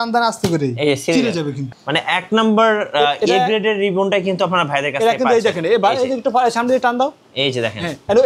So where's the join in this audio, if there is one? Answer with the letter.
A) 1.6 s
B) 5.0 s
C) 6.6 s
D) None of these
A